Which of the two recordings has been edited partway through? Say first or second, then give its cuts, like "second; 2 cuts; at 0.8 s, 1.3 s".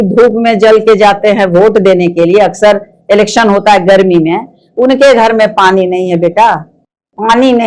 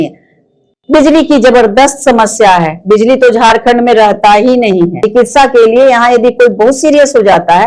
second; 1 cut; at 5.0 s